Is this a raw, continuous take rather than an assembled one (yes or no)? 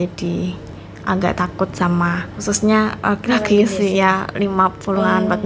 no